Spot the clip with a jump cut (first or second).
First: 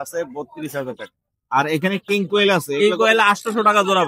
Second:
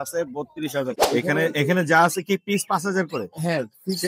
second